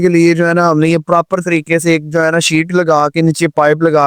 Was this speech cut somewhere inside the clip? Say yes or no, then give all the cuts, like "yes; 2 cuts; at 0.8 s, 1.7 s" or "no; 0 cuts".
no; 0 cuts